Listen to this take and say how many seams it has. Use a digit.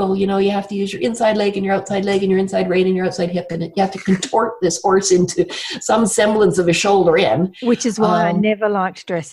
0